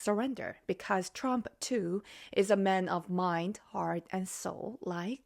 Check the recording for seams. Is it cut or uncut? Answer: uncut